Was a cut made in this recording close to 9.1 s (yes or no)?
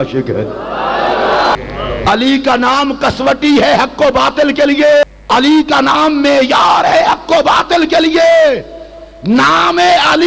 no